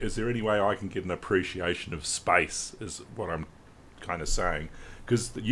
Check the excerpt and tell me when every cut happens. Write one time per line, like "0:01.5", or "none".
none